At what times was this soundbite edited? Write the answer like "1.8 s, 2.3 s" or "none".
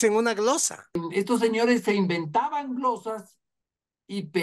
1.0 s